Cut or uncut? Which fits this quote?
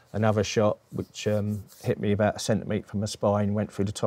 uncut